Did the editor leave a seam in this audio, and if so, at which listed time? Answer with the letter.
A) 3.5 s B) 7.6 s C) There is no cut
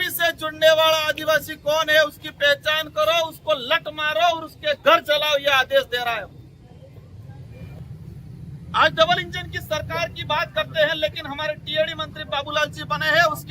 B